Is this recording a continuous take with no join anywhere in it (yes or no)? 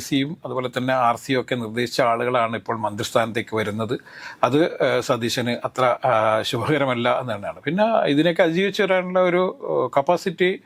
yes